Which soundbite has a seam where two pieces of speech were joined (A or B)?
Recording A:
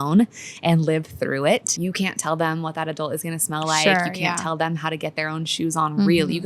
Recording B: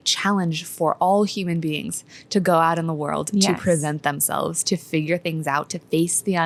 A